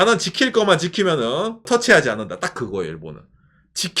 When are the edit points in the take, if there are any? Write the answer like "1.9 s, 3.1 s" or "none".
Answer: 1.6 s